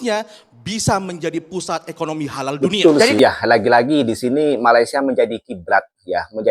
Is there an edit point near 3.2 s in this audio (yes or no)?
yes